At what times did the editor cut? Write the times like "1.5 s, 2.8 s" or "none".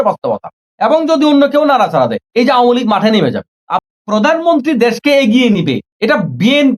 3.9 s